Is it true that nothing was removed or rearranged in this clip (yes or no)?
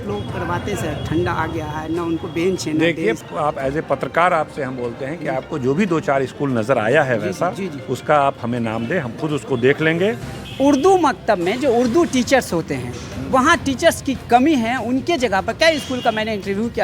no